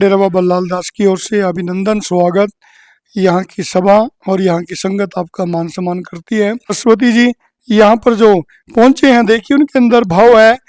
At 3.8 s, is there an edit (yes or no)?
no